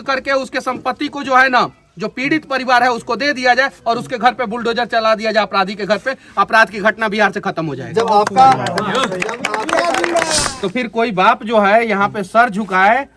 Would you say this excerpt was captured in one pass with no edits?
no; 1 cut; at 10.7 s

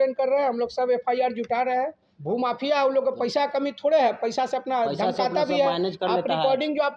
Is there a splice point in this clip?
yes; 1 cut; at 2.1 s

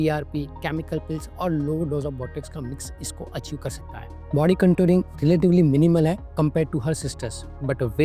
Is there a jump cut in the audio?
no; 0 cuts

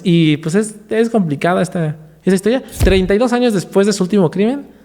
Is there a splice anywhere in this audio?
yes; 1 cut; at 2.8 s

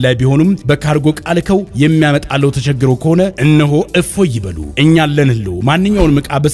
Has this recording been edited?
no; 0 cuts

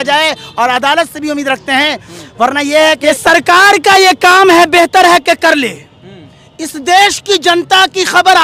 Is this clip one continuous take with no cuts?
no; 1 cut; at 3.0 s

